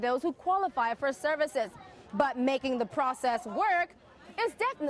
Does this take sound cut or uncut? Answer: uncut